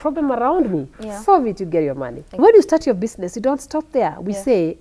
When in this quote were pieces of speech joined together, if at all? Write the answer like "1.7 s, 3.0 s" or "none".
2.4 s

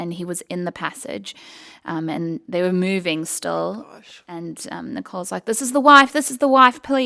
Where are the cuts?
none

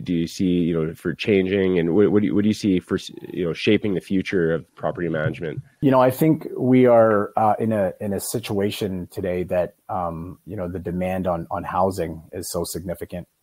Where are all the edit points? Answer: 6.2 s

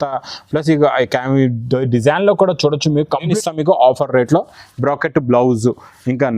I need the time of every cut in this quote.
3.2 s

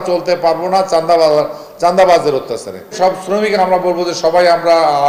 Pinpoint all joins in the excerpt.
2.9 s

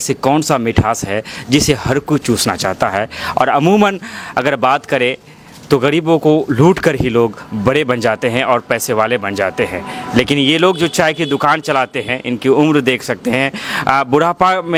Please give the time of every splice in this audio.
none

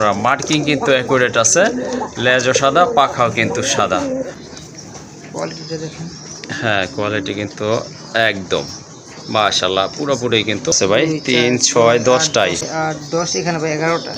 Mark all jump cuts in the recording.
4.4 s, 11.0 s, 12.7 s

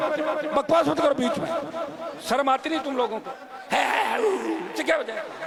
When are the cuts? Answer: none

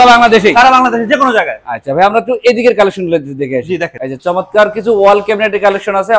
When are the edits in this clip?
none

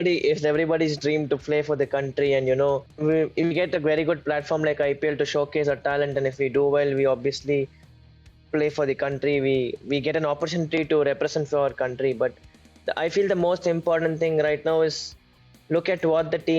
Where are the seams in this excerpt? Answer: 2.9 s

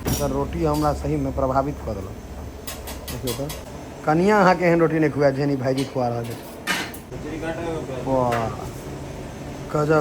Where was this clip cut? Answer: 3.6 s, 7.1 s

